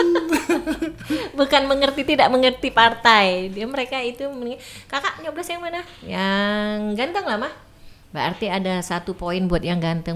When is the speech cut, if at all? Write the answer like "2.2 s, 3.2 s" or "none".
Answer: none